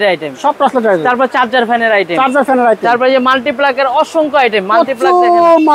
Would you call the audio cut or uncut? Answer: uncut